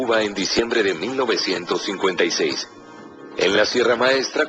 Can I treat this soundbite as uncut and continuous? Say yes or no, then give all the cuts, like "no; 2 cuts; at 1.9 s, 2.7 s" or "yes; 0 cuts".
yes; 0 cuts